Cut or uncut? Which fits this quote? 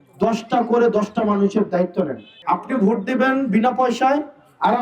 cut